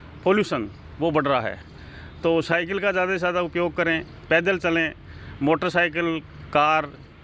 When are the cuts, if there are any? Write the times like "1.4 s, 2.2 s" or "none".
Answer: none